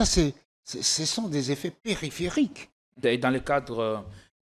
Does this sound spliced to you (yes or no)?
yes